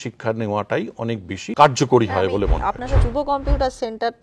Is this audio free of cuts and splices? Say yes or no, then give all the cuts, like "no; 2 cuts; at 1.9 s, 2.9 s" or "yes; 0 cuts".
no; 2 cuts; at 1.5 s, 3.0 s